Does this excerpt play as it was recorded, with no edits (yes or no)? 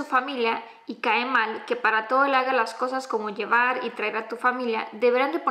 yes